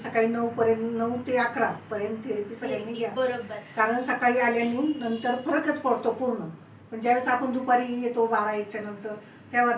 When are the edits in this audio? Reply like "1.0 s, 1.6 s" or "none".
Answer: none